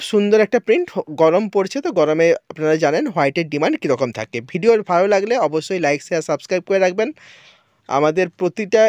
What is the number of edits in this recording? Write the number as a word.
zero